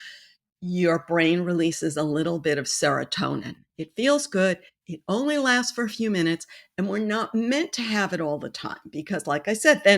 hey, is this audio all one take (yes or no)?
no